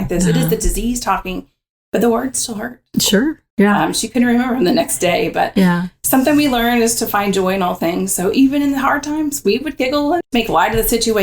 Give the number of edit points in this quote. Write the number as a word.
one